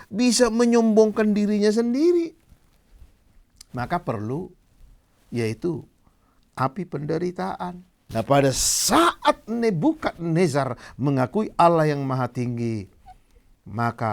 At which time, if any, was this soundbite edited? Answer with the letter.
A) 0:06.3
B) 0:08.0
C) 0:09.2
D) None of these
B